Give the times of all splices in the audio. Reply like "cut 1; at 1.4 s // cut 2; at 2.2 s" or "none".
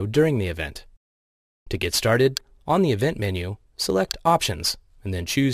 none